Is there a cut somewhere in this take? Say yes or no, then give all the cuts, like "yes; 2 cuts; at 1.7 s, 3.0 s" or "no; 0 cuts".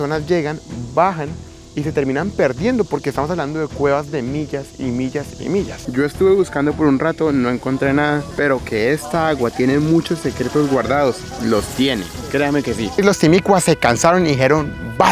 yes; 2 cuts; at 5.8 s, 13.0 s